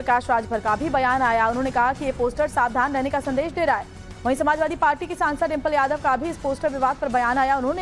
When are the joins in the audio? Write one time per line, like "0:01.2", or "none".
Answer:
0:05.6